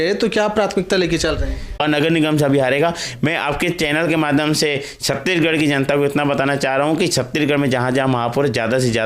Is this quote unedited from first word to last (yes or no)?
no